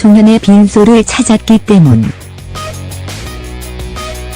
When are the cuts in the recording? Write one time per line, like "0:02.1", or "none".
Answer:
0:00.9